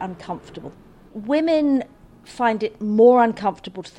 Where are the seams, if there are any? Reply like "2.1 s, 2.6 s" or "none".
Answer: 1.0 s